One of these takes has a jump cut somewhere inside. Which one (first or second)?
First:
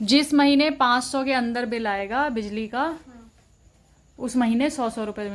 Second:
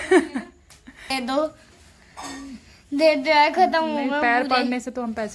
second